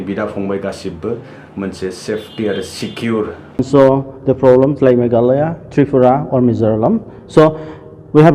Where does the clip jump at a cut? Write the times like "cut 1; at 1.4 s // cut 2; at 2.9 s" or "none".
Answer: cut 1; at 3.6 s